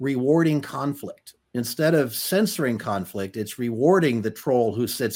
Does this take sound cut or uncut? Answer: uncut